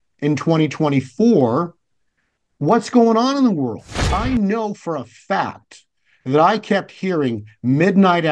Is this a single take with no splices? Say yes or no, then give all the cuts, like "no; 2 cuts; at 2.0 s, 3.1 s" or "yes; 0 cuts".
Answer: no; 1 cut; at 4.1 s